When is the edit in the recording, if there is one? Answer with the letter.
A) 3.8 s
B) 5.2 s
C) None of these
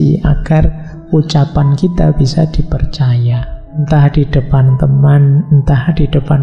A